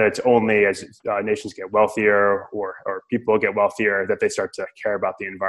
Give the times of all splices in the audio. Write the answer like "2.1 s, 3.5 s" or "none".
none